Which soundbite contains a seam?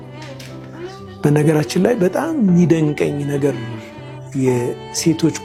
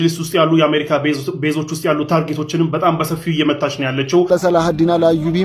second; 1 cut; at 4.3 s

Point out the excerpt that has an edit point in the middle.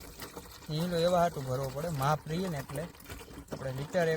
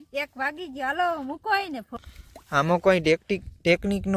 second; 1 cut; at 2.0 s

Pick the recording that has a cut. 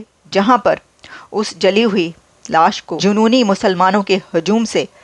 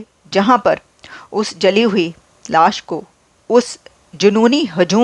first; 1 cut; at 2.9 s

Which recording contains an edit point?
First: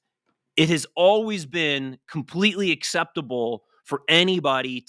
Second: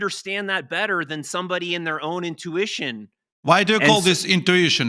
second; 1 cut; at 3.3 s

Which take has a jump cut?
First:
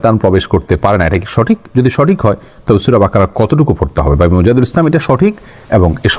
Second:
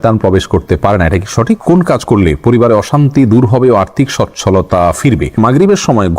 second; 2 cuts; at 1.6 s, 5.4 s

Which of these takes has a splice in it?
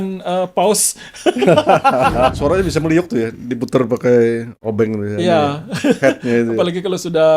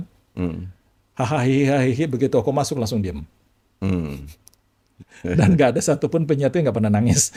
first; 1 cut; at 2.4 s

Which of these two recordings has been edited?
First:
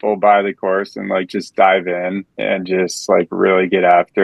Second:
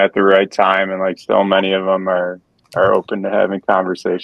first; 1 cut; at 2.3 s

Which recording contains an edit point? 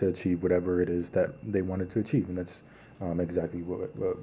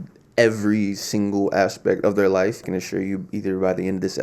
second; 1 cut; at 2.6 s

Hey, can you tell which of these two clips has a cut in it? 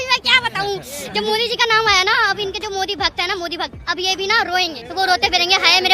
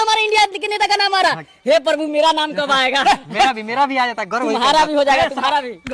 first; 1 cut; at 4.8 s

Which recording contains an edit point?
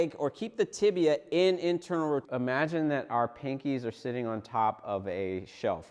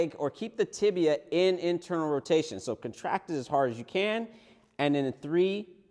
first; 1 cut; at 2.2 s

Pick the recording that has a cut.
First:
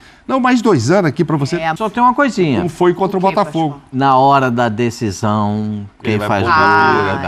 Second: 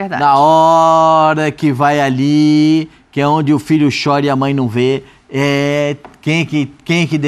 first; 1 cut; at 1.8 s

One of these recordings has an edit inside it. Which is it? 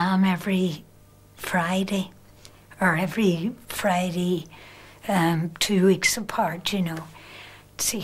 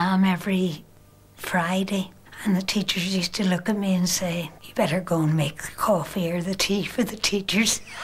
second; 2 cuts; at 2.2 s, 4.6 s

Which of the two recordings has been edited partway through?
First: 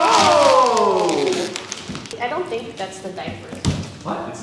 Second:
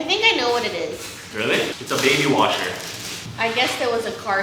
second; 1 cut; at 1.8 s

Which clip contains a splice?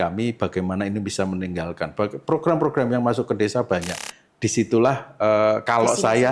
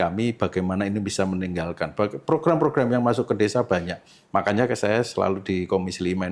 first; 1 cut; at 4.1 s

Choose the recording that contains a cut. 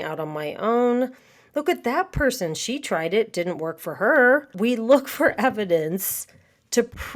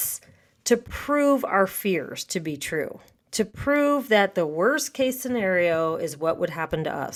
first; 1 cut; at 4.5 s

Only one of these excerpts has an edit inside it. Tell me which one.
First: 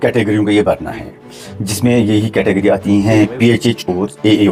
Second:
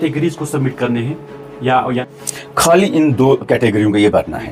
second; 1 cut; at 2.1 s

